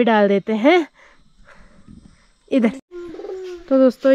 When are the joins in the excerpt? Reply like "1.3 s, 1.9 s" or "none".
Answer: 2.8 s